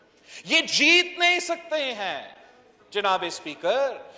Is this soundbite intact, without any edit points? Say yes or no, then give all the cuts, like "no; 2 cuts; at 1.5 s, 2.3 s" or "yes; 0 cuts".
yes; 0 cuts